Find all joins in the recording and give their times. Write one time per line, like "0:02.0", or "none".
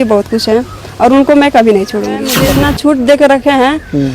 0:02.3